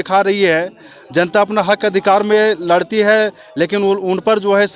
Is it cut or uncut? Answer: uncut